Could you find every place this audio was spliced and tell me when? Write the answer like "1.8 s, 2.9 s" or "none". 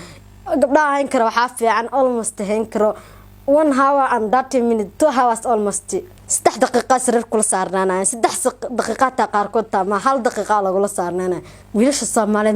11.5 s